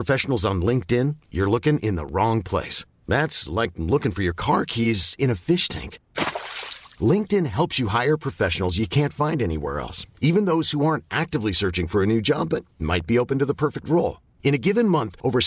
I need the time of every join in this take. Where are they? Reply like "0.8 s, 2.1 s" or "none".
none